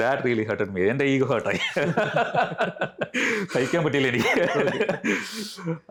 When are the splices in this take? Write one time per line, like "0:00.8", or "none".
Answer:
none